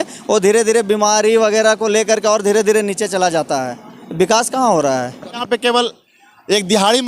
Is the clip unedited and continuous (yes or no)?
no